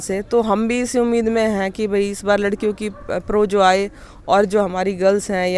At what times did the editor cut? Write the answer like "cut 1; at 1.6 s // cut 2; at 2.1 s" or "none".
none